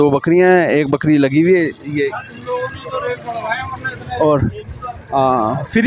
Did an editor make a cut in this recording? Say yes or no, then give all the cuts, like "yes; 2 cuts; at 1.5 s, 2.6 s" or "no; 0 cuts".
no; 0 cuts